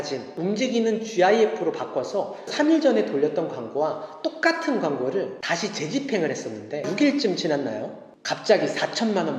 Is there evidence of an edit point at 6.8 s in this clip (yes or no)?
yes